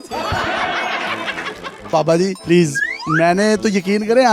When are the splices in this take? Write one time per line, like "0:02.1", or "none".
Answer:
0:01.9